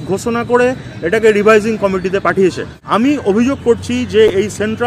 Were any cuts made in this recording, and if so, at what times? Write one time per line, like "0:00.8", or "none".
0:02.8